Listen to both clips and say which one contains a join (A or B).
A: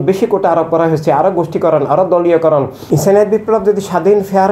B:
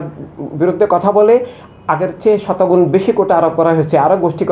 A